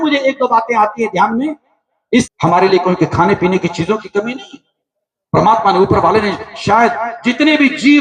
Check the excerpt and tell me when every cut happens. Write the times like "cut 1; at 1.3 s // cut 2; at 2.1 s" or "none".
cut 1; at 2.3 s